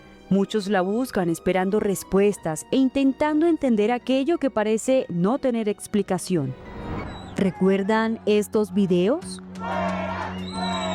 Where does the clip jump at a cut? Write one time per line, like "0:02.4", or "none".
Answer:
0:07.3